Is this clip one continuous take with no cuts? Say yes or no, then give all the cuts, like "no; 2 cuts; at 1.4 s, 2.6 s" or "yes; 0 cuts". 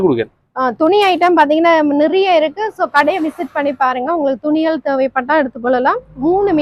yes; 0 cuts